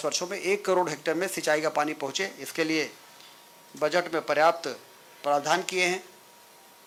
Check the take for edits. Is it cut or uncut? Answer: uncut